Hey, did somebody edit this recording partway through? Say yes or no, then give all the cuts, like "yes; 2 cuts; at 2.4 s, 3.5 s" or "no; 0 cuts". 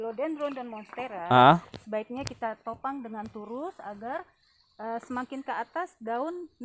no; 0 cuts